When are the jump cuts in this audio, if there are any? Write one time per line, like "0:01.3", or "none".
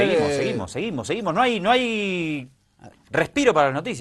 0:01.7

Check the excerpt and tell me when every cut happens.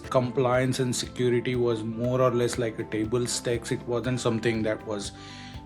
none

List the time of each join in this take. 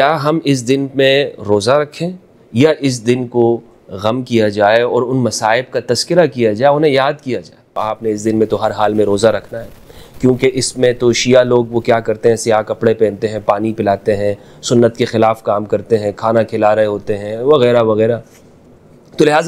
0:07.8

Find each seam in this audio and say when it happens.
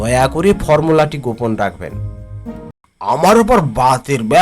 0:02.7

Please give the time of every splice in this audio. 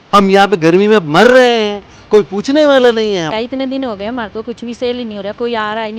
0:03.4

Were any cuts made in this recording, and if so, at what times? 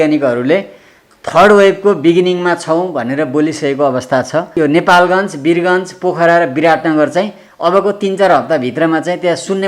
0:04.5

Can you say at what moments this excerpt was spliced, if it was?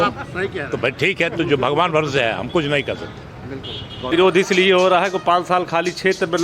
0:04.1

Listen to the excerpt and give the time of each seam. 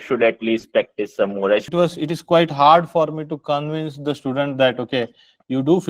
0:01.7

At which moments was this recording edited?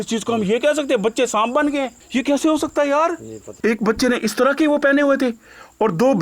0:02.0
0:03.4

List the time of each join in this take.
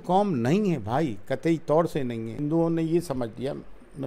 0:02.4

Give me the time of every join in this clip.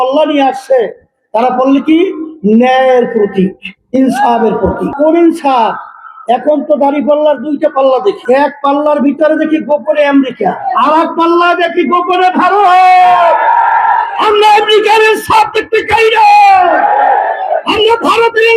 0:04.9
0:08.2
0:10.7
0:14.2

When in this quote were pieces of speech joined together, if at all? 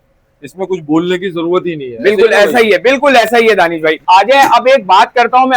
0:04.0

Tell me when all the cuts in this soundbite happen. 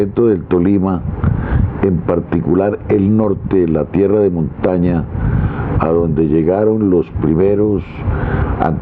none

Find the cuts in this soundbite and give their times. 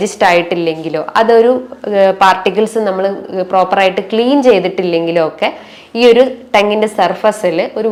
none

